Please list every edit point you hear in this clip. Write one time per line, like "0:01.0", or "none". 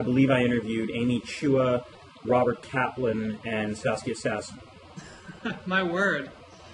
none